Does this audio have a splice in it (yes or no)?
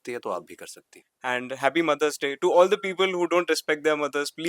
yes